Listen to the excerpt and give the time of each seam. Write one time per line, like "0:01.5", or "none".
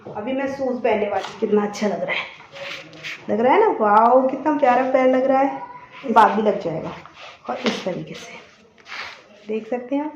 0:01.3
0:06.1